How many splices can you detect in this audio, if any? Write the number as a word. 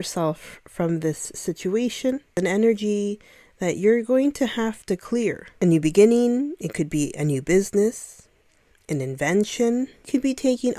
three